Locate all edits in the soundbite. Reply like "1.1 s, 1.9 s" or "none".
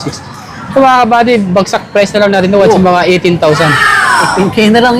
none